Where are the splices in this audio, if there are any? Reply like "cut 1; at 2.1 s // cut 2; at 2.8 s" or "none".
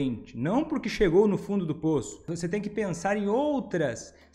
cut 1; at 2.2 s